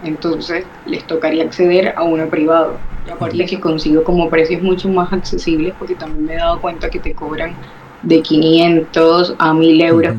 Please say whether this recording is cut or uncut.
cut